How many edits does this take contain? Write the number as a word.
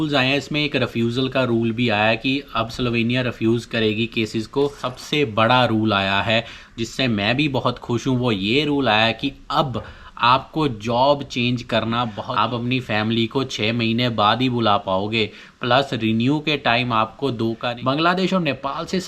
three